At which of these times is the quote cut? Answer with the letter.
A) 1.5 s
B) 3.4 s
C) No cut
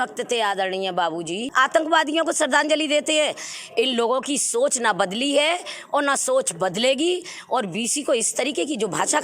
A